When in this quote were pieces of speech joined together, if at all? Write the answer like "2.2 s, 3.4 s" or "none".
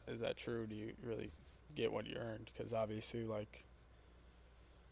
none